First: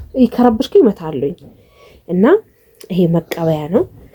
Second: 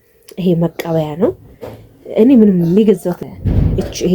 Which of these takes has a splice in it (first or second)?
second